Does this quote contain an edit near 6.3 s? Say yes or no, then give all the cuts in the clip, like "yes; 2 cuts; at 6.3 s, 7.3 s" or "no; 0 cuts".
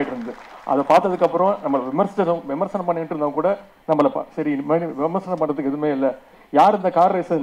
yes; 1 cut; at 6.3 s